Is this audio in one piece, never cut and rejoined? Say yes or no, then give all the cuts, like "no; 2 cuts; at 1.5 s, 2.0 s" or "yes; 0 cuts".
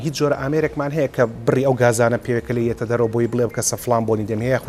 yes; 0 cuts